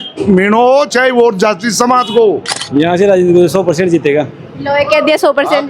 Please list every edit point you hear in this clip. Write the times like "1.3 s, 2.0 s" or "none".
2.5 s